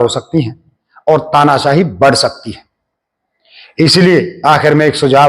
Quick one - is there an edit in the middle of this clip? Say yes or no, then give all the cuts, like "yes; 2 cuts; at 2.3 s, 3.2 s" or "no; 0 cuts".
no; 0 cuts